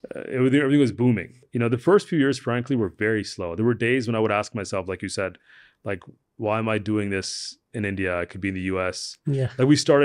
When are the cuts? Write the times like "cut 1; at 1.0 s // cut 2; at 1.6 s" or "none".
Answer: cut 1; at 1.4 s